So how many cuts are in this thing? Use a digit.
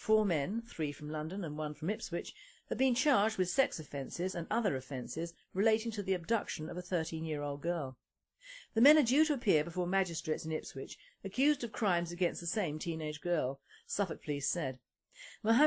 1